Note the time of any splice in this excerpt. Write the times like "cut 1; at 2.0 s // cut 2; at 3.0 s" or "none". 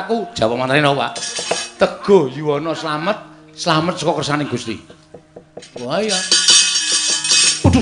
cut 1; at 5.8 s